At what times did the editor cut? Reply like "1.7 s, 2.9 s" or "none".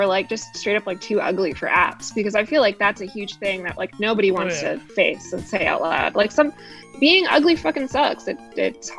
none